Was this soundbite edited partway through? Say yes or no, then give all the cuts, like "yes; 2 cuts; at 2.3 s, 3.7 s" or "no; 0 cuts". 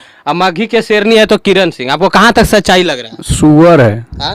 no; 0 cuts